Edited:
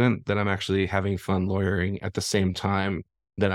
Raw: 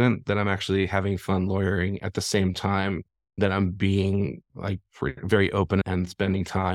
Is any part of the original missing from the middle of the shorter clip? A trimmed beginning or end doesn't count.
no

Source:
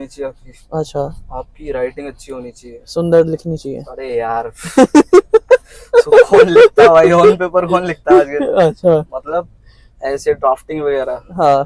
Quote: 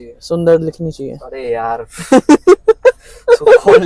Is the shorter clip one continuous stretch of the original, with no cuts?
yes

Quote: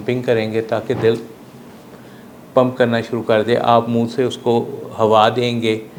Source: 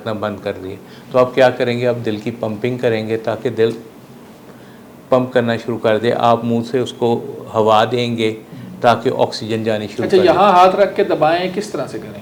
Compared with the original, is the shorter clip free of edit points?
yes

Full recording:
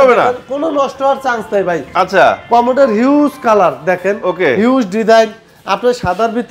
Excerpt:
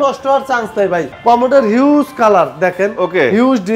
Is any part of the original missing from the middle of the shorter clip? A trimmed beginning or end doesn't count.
yes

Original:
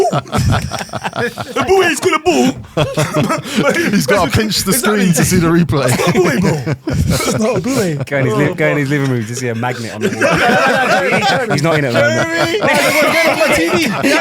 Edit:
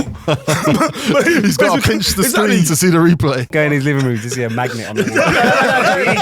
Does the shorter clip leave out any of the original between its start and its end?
yes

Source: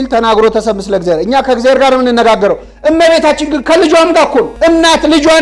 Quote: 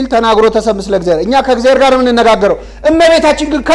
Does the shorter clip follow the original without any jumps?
yes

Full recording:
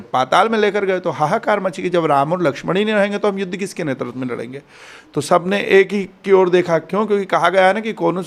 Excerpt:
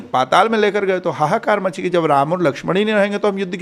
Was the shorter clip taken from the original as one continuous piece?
yes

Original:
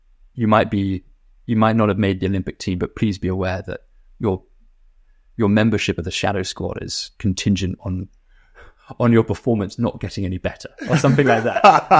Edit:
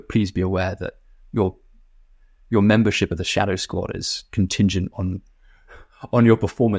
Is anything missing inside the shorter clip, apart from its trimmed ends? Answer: no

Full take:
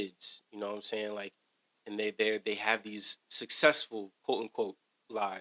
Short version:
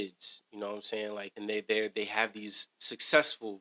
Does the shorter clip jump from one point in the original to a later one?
yes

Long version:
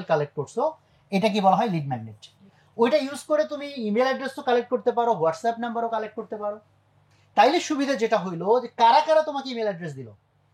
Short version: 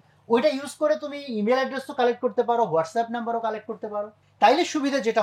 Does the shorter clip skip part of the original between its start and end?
yes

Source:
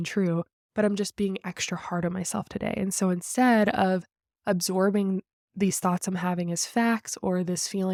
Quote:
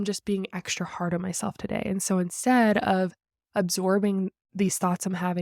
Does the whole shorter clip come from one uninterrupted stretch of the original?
no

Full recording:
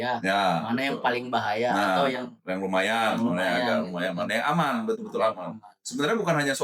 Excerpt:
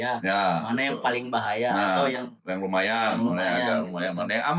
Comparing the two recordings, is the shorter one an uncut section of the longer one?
yes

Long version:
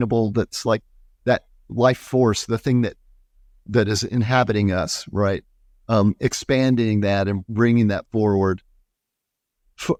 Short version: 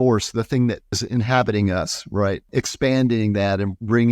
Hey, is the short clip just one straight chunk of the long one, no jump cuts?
no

